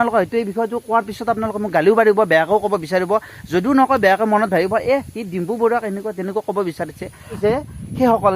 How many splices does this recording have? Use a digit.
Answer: 1